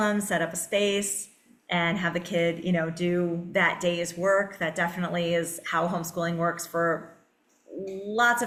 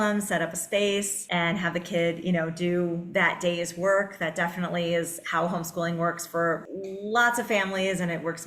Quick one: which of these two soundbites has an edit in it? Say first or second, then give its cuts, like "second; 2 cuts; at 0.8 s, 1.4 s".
second; 2 cuts; at 1.2 s, 6.7 s